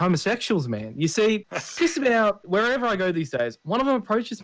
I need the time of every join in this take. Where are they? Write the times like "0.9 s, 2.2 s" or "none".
1.6 s, 2.4 s